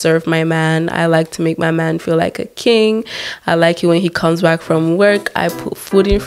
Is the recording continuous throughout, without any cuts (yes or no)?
yes